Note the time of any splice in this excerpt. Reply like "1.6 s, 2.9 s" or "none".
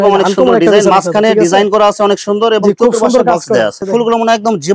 3.8 s